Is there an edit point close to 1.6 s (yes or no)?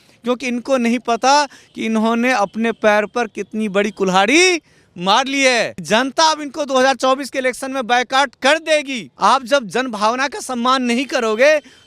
no